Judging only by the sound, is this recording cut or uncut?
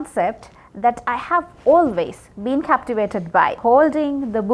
cut